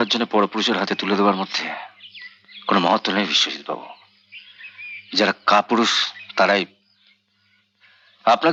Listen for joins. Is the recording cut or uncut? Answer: uncut